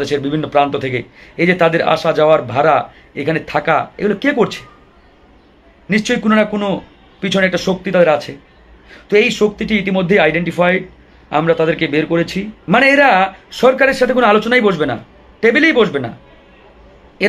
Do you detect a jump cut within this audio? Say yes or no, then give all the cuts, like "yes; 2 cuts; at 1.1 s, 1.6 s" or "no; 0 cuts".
yes; 1 cut; at 12.5 s